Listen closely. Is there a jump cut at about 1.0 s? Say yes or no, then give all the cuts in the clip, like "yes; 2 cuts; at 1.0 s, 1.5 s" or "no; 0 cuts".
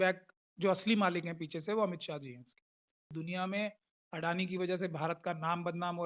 no; 1 cut; at 3.1 s